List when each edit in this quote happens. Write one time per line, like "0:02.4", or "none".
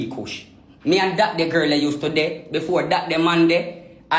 none